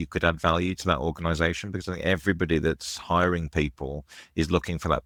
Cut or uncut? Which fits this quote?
uncut